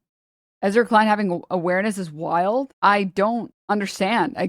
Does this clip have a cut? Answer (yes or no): yes